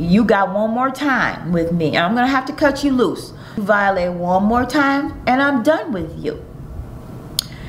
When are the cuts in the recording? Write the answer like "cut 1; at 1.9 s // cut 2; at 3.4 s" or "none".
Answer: cut 1; at 3.6 s